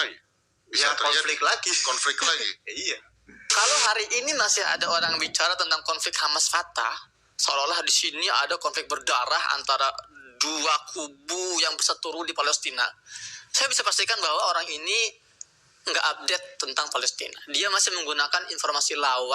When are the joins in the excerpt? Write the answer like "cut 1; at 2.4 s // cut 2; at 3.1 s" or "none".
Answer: cut 1; at 3.4 s